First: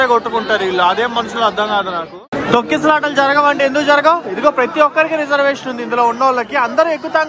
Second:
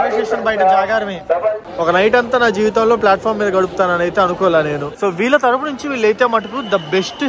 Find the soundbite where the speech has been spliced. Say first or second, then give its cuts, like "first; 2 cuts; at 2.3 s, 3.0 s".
second; 2 cuts; at 1.6 s, 4.9 s